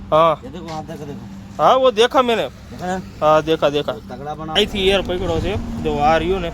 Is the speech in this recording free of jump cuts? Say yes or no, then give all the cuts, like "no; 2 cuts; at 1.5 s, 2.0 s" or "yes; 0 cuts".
no; 1 cut; at 4.5 s